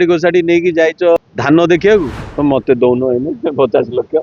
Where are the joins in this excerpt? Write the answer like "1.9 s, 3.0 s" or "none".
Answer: 1.2 s, 2.2 s